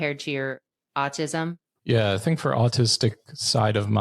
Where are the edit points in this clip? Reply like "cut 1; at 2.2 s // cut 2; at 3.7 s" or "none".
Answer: cut 1; at 1.7 s